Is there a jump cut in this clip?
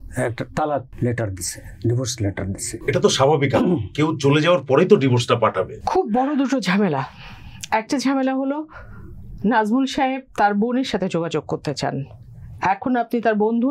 no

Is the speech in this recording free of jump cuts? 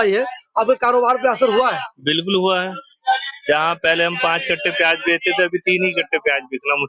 yes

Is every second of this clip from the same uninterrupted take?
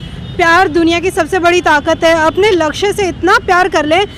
yes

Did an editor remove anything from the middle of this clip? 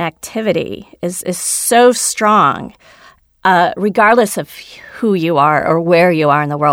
no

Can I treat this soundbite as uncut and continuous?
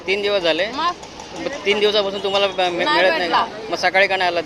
yes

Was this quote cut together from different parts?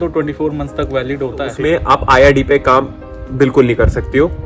yes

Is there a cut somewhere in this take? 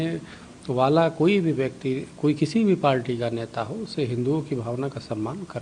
no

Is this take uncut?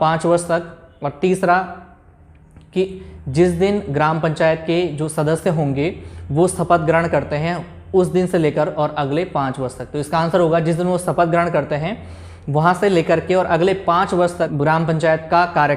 no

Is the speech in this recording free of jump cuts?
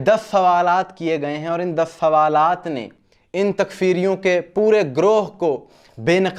yes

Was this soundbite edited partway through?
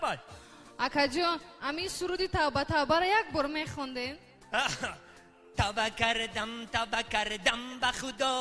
no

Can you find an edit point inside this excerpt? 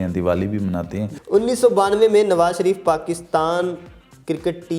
yes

